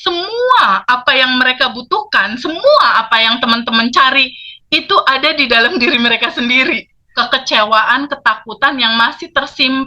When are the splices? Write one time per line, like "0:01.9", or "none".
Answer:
0:07.0